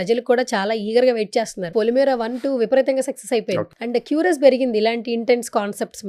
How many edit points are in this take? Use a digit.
2